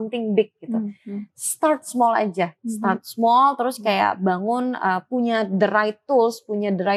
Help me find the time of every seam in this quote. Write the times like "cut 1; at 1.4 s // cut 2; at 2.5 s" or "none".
none

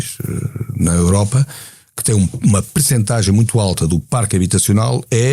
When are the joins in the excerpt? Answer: none

